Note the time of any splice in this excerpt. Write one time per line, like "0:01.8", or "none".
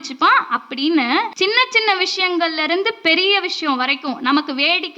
0:01.3